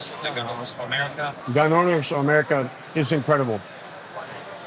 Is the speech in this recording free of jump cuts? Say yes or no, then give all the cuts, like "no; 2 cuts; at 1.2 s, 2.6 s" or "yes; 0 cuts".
no; 1 cut; at 1.4 s